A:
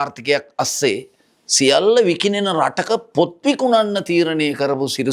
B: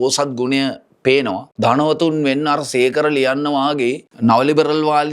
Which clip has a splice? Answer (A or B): B